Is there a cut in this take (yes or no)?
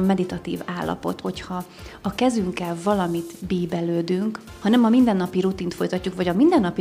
yes